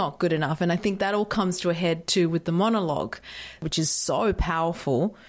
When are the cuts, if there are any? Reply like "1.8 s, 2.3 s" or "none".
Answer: none